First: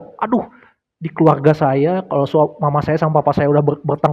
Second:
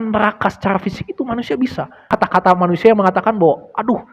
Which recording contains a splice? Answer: second; 1 cut; at 2.2 s

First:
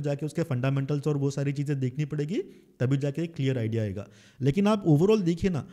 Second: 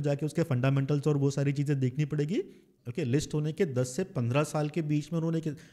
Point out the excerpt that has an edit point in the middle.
second; 1 cut; at 2.6 s

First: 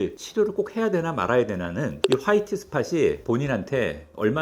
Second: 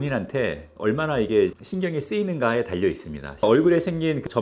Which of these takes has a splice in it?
second; 1 cut; at 3.4 s

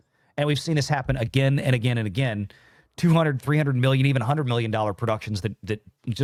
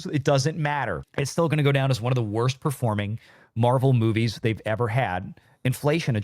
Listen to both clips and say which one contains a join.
second; 1 cut; at 1.0 s

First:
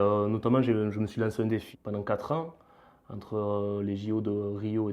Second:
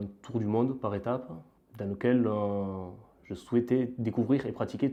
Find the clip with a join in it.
first; 1 cut; at 1.7 s

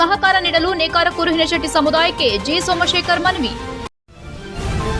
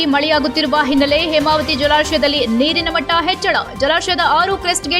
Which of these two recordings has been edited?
first; 1 cut; at 3.9 s

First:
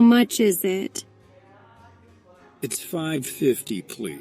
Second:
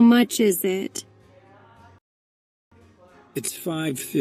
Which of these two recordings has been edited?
first; 1 cut; at 2.0 s

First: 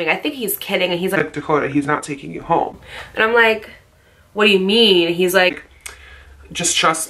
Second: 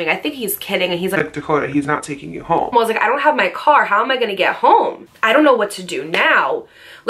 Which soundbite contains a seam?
second; 2 cuts; at 2.7 s, 5.1 s

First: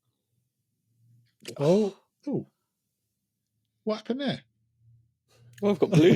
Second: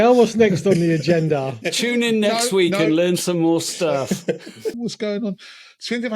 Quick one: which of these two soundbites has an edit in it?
second; 1 cut; at 4.8 s

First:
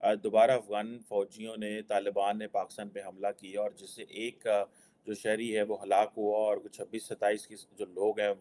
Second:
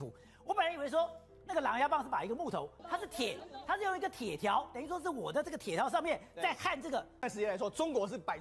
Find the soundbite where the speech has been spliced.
second; 2 cuts; at 2.8 s, 7.2 s

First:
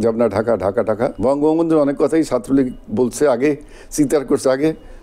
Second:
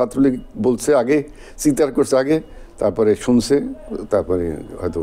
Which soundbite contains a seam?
first; 1 cut; at 1.2 s

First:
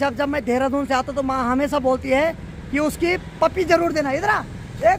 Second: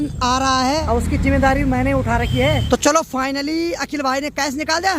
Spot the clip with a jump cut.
second; 2 cuts; at 0.8 s, 2.6 s

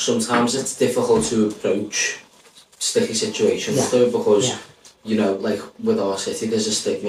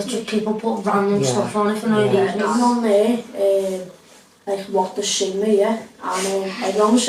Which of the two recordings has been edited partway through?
second; 1 cut; at 2.5 s

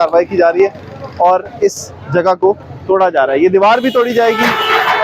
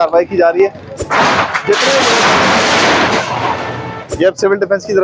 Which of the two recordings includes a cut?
second; 2 cuts; at 1.0 s, 4.0 s

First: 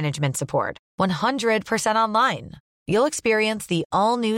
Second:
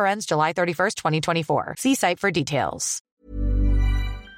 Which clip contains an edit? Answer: second; 1 cut; at 3.2 s

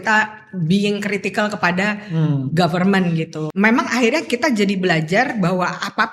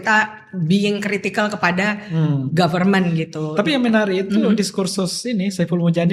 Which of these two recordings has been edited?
first; 1 cut; at 3.4 s

